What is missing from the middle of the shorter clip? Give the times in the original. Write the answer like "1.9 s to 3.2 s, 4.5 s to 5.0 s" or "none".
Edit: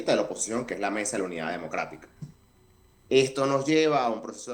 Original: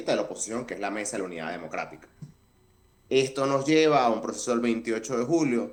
none